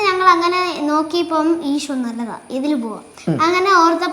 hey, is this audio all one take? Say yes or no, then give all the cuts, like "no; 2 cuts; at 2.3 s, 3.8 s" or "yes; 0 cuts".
yes; 0 cuts